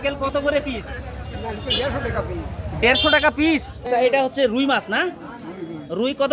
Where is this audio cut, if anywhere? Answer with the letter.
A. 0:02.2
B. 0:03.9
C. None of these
B